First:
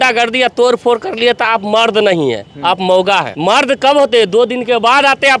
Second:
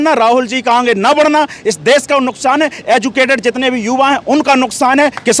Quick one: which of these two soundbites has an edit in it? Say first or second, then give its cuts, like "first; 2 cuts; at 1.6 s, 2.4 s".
first; 1 cut; at 3.3 s